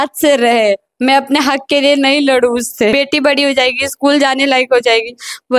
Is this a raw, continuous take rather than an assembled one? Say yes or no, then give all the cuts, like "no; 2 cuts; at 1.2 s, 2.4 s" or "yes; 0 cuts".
no; 1 cut; at 2.9 s